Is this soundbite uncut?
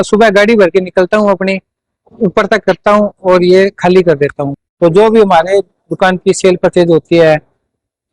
no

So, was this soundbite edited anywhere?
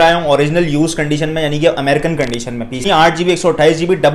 yes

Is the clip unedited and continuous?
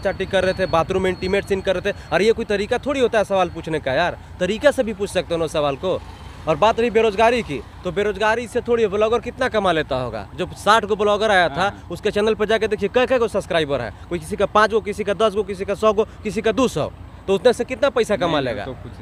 yes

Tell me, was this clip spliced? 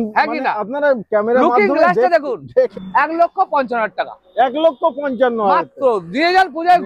yes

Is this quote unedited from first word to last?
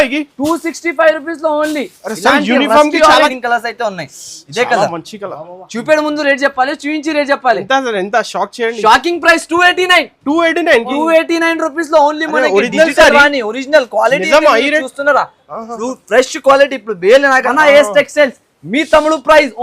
no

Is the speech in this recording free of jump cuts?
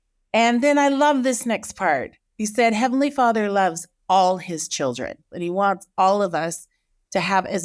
no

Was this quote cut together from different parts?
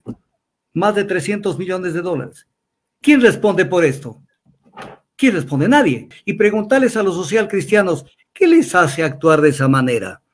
yes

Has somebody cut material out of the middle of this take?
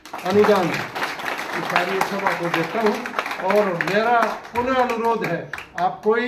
no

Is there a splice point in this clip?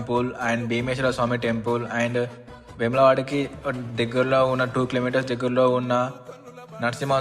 no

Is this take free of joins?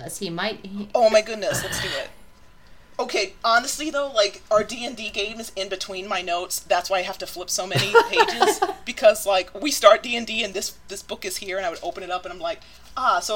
yes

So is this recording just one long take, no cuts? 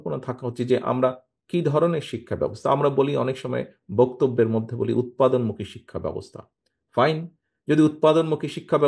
yes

